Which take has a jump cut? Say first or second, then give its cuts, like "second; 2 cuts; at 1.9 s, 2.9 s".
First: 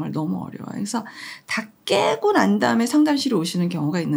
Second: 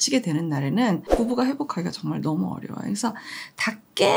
second; 1 cut; at 1.1 s